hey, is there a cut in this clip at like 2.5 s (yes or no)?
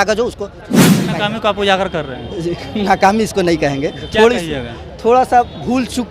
no